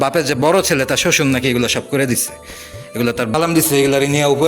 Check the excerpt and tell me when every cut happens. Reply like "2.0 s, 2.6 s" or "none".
3.3 s